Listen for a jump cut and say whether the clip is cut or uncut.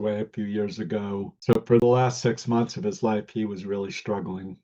cut